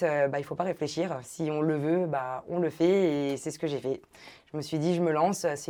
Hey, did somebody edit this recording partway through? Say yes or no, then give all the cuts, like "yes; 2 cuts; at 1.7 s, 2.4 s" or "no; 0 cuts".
no; 0 cuts